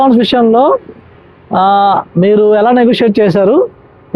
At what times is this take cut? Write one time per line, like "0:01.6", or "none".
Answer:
none